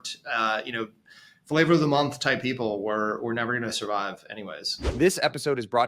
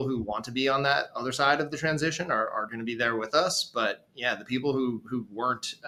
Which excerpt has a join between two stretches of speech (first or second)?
first